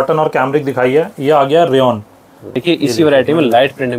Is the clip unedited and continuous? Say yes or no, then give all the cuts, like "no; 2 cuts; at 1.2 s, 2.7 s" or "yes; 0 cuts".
no; 1 cut; at 2.6 s